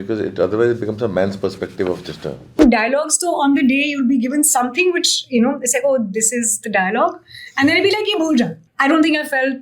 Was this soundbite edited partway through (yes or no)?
yes